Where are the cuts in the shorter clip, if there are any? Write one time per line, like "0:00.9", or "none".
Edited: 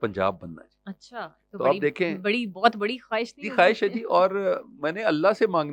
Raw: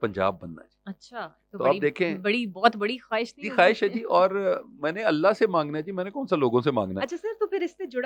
none